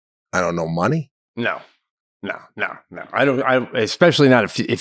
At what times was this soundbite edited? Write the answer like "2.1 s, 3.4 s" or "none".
1.2 s